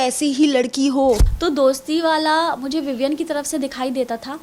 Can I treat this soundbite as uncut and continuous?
no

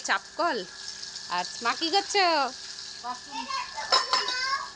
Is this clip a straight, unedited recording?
yes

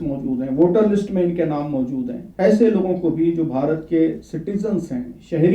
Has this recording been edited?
yes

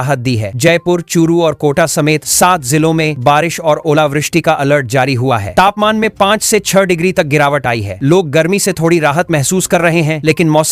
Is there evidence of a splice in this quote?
no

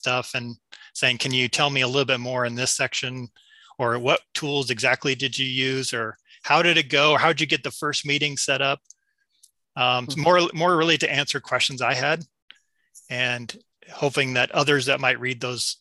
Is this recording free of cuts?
yes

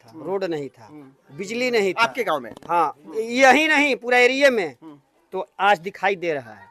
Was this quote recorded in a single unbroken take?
yes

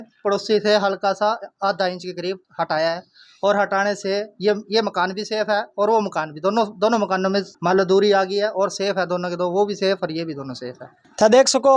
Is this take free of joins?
yes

